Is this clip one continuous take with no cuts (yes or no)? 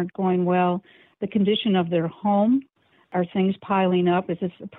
no